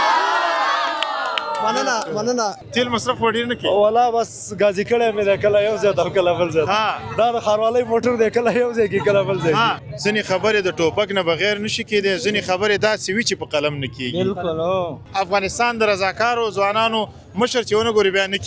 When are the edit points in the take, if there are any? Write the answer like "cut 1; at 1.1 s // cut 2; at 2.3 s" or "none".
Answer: cut 1; at 2.6 s // cut 2; at 9.9 s // cut 3; at 15.0 s